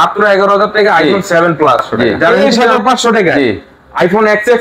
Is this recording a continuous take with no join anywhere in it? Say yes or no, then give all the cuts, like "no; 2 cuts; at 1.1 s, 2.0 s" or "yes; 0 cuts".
no; 1 cut; at 2.4 s